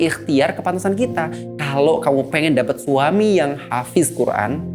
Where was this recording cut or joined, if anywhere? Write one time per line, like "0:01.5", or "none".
none